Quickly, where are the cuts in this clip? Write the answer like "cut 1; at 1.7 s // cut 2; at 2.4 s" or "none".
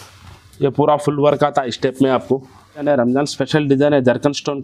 cut 1; at 2.8 s